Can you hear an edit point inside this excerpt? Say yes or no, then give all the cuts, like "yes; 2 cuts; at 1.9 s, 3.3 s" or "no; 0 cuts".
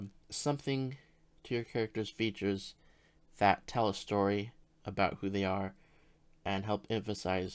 no; 0 cuts